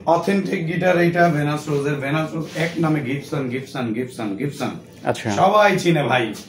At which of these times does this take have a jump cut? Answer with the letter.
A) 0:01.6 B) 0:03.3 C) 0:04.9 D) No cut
D